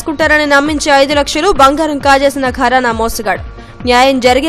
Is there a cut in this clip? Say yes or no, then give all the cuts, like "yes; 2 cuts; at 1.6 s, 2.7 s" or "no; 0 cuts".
no; 0 cuts